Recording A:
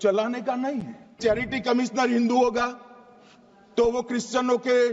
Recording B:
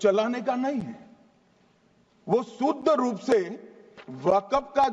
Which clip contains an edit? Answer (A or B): A